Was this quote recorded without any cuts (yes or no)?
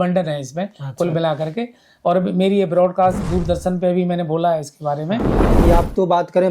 no